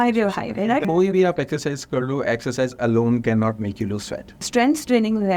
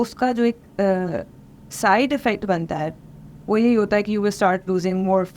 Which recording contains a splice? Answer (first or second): first